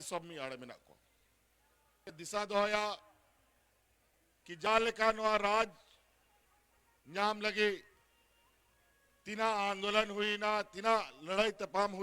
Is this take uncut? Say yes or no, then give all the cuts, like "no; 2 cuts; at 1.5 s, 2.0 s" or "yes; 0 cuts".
no; 1 cut; at 2.0 s